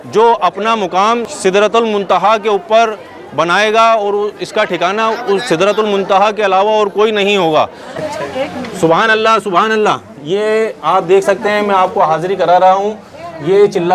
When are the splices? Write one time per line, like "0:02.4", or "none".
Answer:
0:01.3
0:08.1